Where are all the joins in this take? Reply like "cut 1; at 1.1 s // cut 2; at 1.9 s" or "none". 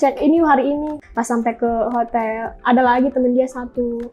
cut 1; at 1.0 s

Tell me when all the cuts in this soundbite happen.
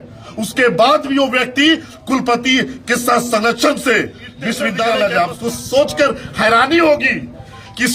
cut 1; at 4.8 s

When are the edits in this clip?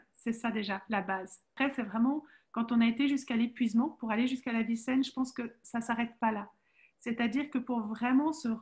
cut 1; at 1.5 s

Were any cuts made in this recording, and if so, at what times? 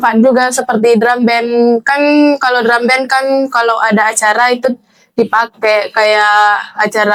none

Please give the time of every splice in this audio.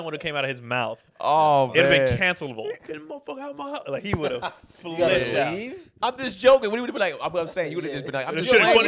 cut 1; at 2.7 s // cut 2; at 5.8 s

